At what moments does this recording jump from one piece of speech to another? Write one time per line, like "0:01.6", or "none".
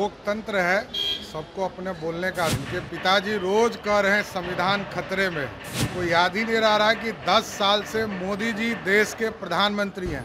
0:02.5
0:05.7